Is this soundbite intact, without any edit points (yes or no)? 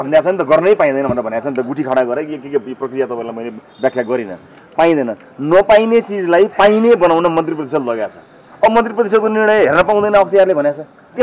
yes